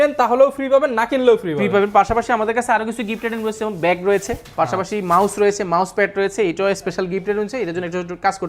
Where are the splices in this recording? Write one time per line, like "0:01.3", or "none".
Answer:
none